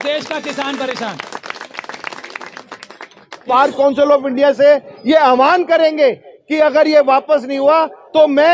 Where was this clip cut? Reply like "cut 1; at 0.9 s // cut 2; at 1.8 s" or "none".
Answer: cut 1; at 3.5 s

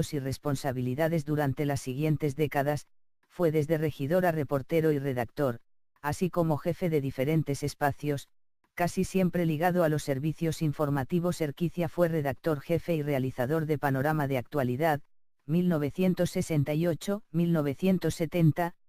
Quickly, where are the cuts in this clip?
cut 1; at 8.6 s

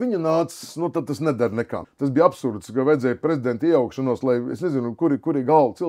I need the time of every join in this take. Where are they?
cut 1; at 1.9 s

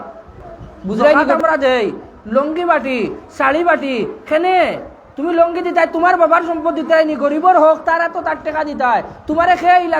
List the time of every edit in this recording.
cut 1; at 1.4 s

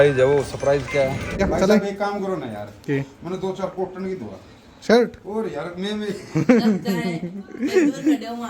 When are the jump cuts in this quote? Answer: cut 1; at 1.4 s

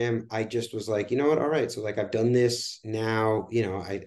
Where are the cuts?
cut 1; at 2.7 s

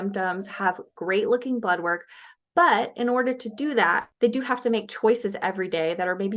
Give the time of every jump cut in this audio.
cut 1; at 4.1 s

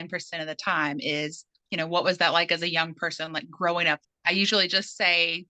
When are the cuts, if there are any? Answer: cut 1; at 1.6 s // cut 2; at 4.0 s

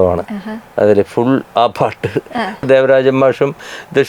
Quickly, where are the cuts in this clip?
cut 1; at 2.6 s

